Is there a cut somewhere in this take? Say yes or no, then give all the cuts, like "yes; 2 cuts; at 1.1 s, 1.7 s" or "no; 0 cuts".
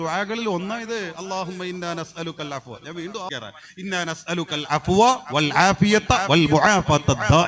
yes; 1 cut; at 3.3 s